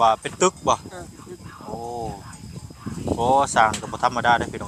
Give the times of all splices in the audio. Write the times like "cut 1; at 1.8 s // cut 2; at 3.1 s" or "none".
cut 1; at 3.0 s